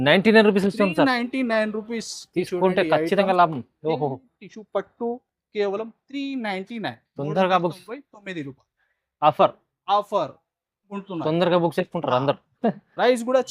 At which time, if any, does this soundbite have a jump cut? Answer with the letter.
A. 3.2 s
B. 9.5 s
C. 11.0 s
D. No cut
C